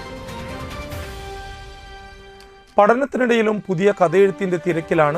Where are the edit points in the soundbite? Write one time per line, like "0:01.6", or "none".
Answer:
none